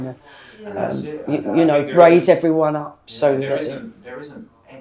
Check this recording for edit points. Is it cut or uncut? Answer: uncut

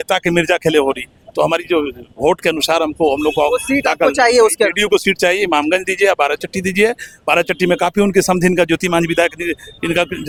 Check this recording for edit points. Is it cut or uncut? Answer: uncut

